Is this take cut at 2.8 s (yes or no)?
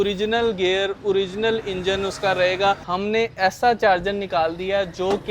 yes